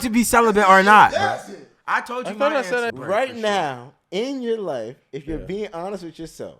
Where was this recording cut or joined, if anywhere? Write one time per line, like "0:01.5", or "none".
0:02.9